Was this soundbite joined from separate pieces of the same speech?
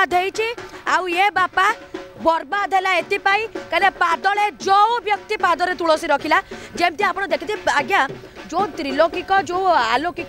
no; 0 cuts

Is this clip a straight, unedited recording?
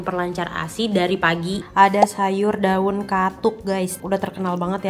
no; 2 cuts; at 1.6 s, 4.0 s

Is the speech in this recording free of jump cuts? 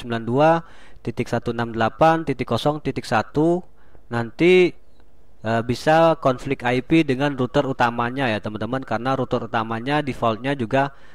yes; 0 cuts

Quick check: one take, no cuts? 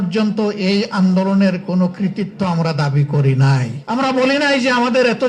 no; 1 cut; at 3.8 s

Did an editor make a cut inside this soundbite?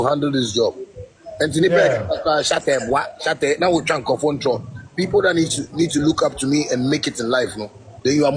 no; 0 cuts

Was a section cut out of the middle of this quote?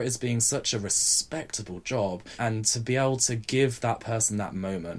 yes; 1 cut; at 2.3 s

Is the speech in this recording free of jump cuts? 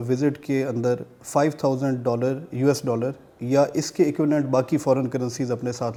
yes; 0 cuts

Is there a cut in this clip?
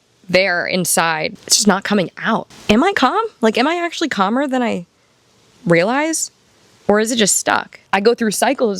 yes; 3 cuts; at 1.3 s, 2.5 s, 7.7 s

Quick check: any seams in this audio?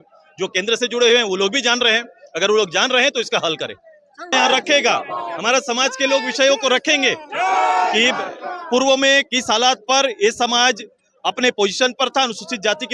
yes; 1 cut; at 4.3 s

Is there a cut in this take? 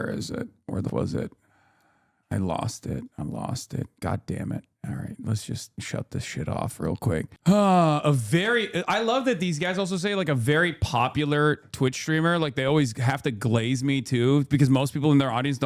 yes; 2 cuts; at 0.9 s, 5.8 s

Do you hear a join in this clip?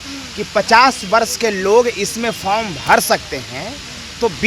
no; 0 cuts

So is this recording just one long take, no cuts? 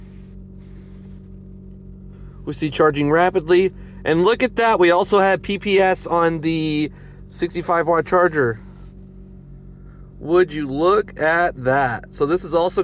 yes; 0 cuts

